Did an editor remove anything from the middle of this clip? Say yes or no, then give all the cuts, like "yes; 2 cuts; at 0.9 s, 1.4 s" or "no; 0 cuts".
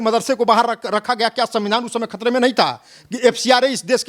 no; 0 cuts